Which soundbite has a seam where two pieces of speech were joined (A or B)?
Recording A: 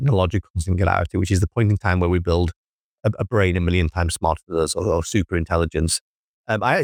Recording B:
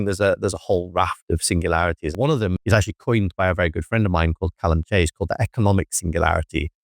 B